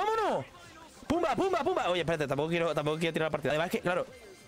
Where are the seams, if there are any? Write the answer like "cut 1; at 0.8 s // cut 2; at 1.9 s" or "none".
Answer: cut 1; at 3.5 s